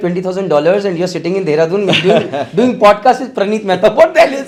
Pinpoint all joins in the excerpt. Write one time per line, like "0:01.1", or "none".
none